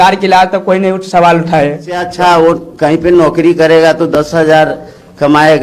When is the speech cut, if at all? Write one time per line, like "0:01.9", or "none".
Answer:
0:02.1